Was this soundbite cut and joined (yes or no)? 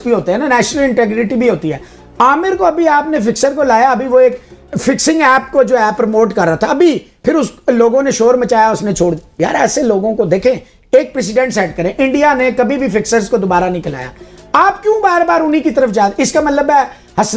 no